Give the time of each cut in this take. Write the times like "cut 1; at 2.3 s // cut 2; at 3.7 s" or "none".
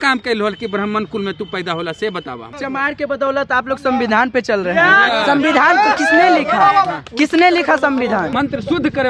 cut 1; at 2.6 s // cut 2; at 8.3 s